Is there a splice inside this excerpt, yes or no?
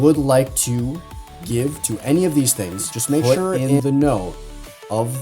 yes